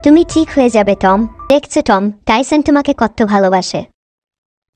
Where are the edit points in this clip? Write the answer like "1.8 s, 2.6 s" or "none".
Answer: 1.4 s

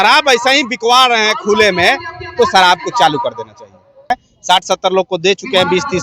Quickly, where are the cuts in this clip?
4.1 s

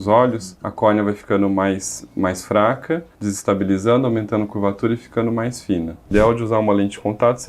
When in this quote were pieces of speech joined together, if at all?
6.1 s

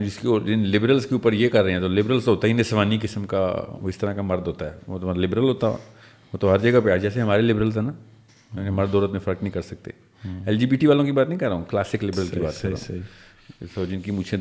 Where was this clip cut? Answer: none

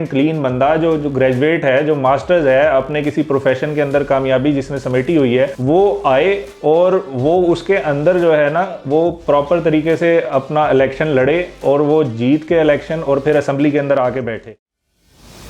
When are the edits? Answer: 14.6 s

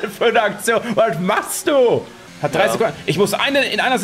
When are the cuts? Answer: 2.2 s

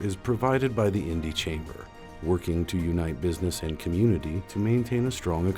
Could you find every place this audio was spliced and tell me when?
none

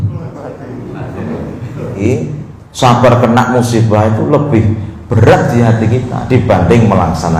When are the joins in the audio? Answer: 2.0 s

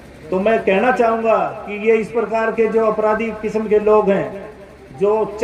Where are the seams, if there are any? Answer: none

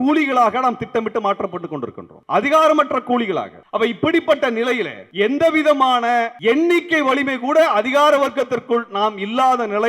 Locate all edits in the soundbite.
2.1 s, 3.6 s, 5.0 s, 6.3 s

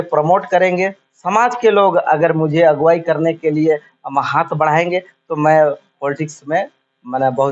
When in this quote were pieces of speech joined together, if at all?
none

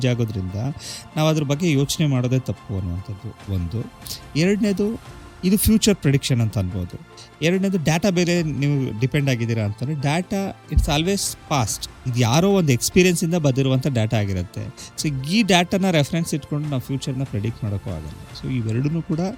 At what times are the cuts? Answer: none

